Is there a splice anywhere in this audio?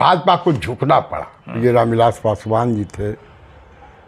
yes; 1 cut; at 1.6 s

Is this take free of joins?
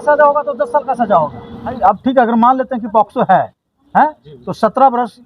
no; 1 cut; at 1.8 s

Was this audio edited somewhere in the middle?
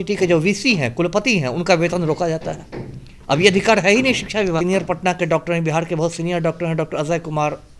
yes; 1 cut; at 4.6 s

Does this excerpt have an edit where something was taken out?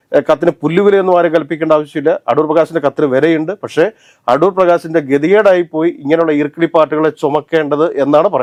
no; 0 cuts

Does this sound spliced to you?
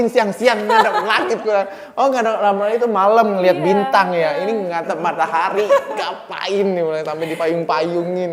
no; 0 cuts

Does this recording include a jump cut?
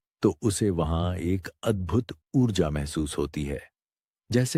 no; 0 cuts

